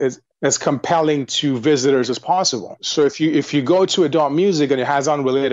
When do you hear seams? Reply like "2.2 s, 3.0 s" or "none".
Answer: 2.8 s